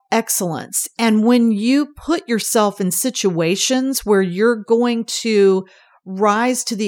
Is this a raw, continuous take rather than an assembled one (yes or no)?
yes